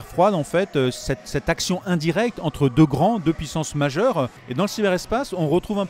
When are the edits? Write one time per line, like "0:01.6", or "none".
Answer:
0:04.4